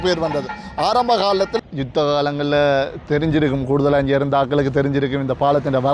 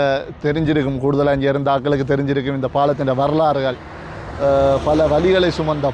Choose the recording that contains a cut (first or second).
first